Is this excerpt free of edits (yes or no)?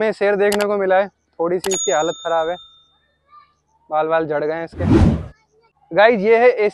yes